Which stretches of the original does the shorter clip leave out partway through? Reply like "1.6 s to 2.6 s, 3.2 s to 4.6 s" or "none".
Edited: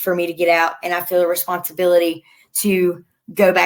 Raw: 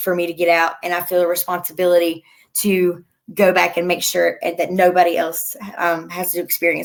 none